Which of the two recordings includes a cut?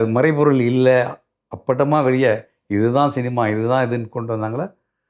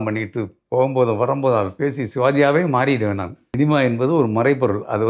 second; 1 cut; at 3.4 s

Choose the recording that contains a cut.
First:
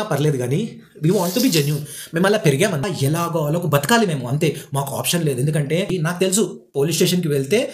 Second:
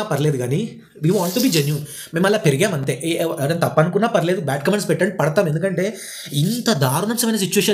first; 2 cuts; at 2.8 s, 5.9 s

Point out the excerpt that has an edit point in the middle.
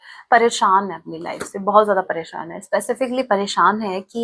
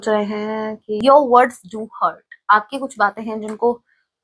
second; 1 cut; at 1.0 s

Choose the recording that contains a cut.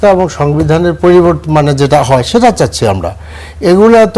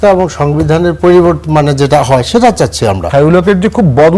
second; 1 cut; at 3.1 s

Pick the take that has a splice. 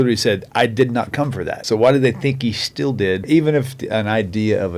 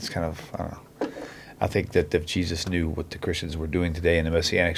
first; 2 cuts; at 1.6 s, 3.2 s

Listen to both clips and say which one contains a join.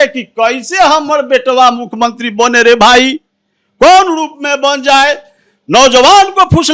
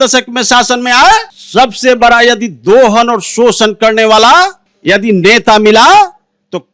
second; 2 cuts; at 1.4 s, 4.7 s

